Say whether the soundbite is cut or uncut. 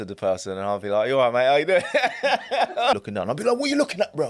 cut